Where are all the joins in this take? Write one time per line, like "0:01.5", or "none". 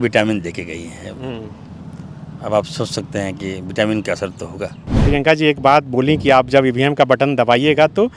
0:05.0

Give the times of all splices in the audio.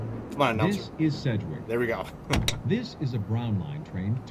none

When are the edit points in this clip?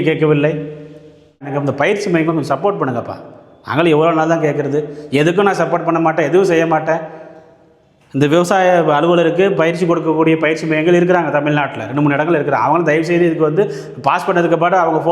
0:01.5

